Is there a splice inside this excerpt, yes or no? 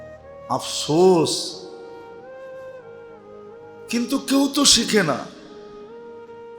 yes